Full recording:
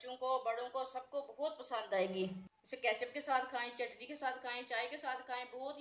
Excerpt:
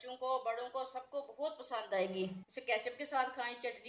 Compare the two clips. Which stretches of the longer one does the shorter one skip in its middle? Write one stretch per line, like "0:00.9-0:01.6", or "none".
0:02.5-0:02.6